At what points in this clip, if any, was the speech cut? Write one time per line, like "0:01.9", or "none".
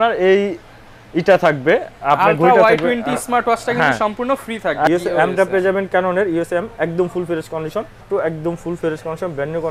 0:04.9
0:08.0